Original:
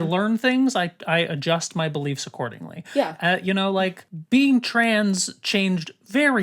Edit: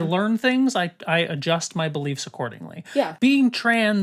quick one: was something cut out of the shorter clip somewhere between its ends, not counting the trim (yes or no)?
yes